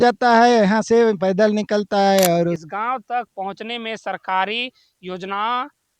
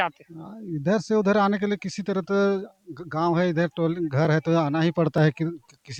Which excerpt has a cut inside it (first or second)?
first